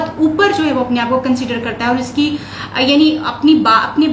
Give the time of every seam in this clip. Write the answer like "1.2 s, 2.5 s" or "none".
none